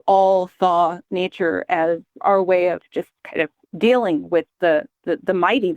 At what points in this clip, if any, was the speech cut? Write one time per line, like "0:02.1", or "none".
0:02.2
0:03.6